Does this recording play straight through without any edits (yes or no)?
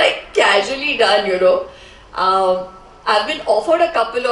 yes